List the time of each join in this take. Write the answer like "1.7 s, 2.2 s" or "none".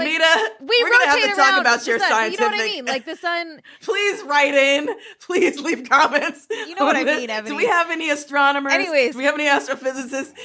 3.7 s